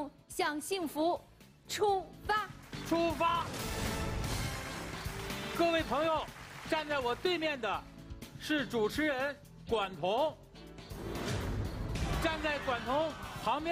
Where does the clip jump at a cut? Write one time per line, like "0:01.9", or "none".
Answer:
none